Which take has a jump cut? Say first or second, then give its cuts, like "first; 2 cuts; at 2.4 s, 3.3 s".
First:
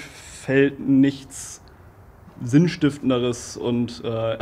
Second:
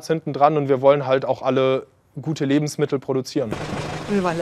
second; 1 cut; at 3.5 s